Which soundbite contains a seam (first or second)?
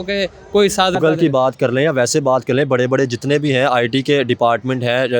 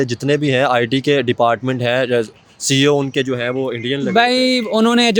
first